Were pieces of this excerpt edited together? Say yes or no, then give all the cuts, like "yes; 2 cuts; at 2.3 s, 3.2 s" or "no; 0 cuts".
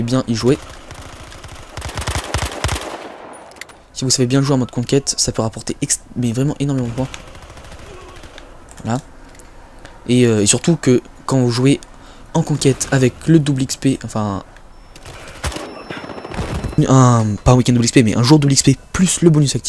no; 0 cuts